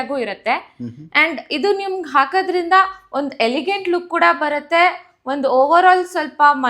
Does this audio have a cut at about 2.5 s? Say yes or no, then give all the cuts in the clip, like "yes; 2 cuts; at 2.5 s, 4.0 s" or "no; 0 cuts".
no; 0 cuts